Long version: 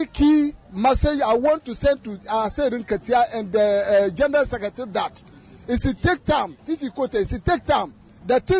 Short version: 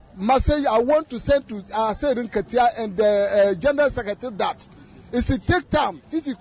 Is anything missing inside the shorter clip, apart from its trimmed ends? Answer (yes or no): no